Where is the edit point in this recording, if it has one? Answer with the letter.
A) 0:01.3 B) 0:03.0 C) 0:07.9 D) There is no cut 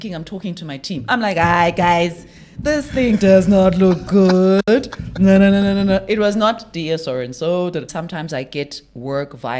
C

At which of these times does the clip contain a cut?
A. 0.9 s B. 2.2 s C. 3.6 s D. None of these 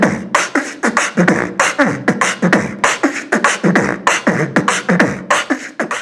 D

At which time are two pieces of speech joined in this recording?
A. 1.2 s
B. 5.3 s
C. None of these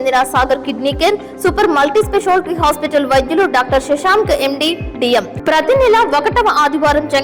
B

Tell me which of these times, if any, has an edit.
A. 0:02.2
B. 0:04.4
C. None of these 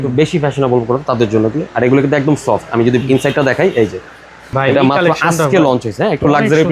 B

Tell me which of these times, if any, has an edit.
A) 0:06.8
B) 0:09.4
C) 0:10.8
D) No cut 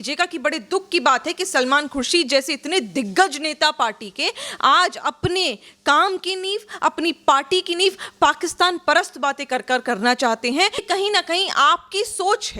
C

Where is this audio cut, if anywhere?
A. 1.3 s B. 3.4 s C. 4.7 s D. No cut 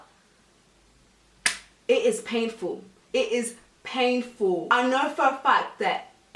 C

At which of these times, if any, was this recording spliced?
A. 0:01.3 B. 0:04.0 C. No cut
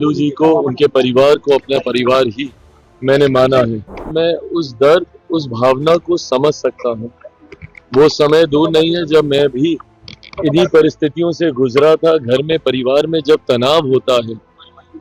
B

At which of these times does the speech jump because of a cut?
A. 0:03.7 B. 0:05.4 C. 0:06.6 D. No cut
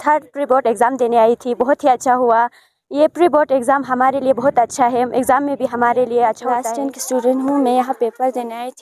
C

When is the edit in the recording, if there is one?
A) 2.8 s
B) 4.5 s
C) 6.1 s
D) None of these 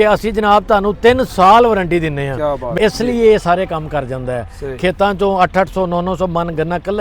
A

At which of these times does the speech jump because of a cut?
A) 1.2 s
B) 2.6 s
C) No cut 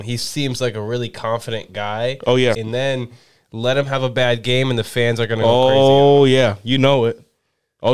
B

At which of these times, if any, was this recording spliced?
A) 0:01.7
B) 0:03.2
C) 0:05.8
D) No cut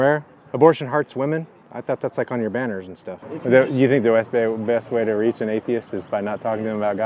B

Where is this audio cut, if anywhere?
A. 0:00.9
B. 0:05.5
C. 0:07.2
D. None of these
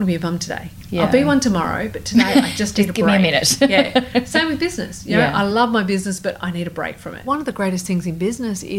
C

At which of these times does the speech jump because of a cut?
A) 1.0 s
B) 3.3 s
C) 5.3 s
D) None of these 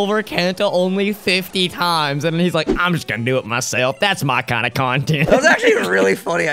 C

